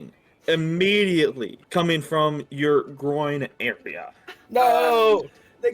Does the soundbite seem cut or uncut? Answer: cut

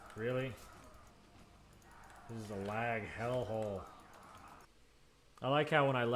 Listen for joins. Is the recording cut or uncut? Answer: cut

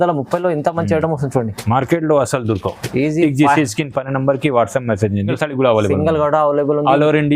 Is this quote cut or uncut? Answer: cut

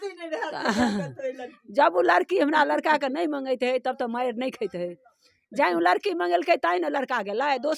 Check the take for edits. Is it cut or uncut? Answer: uncut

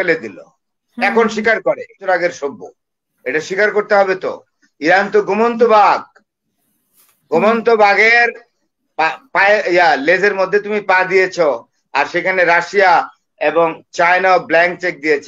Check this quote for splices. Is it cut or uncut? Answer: cut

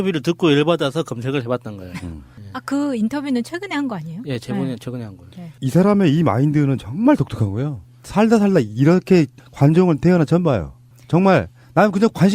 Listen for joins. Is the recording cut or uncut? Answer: cut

